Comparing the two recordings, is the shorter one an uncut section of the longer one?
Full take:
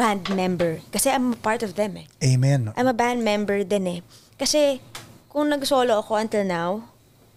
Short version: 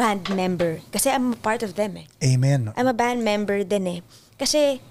yes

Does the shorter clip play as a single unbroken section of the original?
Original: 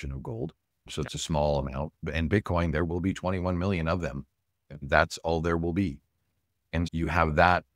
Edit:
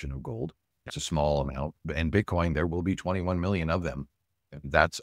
no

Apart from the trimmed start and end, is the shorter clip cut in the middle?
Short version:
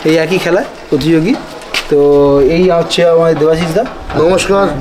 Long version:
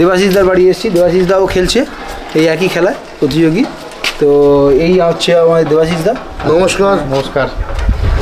no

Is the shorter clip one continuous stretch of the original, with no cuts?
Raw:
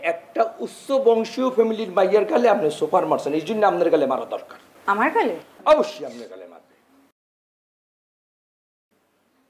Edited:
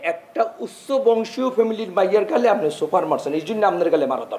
yes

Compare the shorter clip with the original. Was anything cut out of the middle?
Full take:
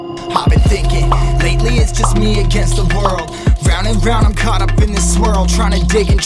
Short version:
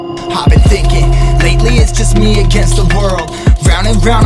no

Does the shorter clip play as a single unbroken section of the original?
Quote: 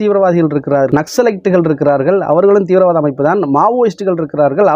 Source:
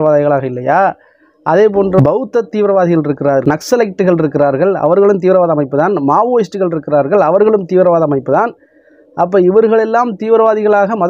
yes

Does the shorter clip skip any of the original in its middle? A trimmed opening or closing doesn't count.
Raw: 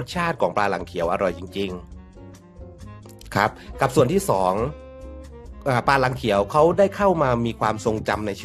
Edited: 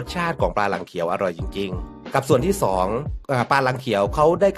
yes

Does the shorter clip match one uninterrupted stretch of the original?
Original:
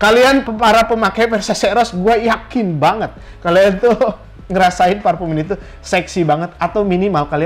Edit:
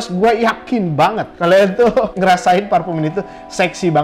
no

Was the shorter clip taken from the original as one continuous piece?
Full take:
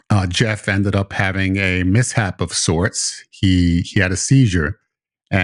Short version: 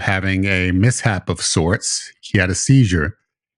no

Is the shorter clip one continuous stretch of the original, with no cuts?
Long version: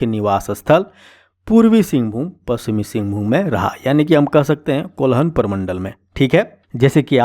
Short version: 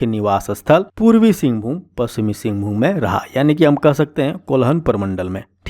no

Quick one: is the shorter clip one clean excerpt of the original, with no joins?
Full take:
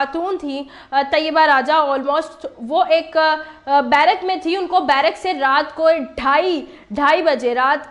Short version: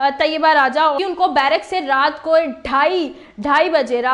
no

